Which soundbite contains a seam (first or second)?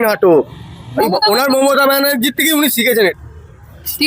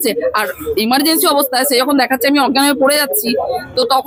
first